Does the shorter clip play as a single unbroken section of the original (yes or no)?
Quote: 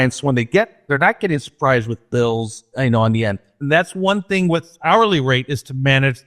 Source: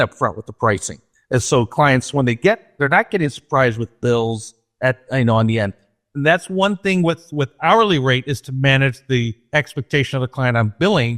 no